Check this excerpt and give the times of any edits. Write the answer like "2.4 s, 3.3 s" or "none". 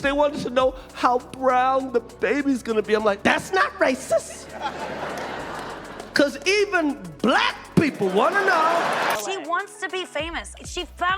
9.2 s